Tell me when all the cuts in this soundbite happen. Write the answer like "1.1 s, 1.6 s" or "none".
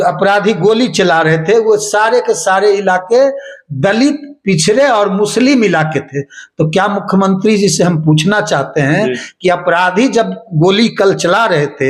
none